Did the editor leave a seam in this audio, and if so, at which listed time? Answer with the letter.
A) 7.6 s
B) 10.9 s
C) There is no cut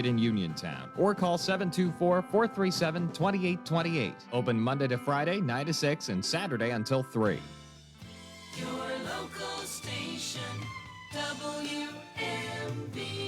A